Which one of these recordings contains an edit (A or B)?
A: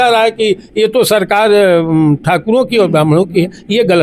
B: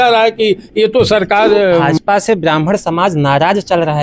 B